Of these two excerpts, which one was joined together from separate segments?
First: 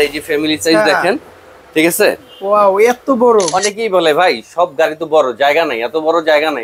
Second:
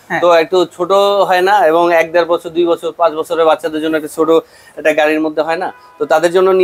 first; 1 cut; at 3.5 s

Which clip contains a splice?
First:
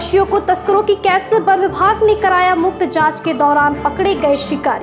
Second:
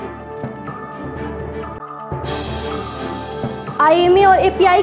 second; 1 cut; at 3.6 s

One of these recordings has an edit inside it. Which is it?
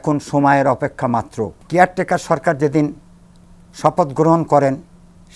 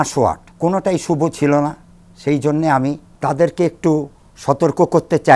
first; 1 cut; at 1.6 s

